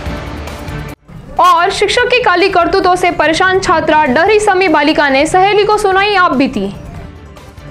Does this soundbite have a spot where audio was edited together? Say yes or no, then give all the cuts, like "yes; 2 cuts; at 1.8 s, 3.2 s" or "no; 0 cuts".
no; 0 cuts